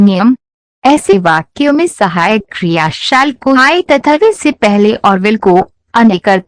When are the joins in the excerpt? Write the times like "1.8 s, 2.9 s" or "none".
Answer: 1.8 s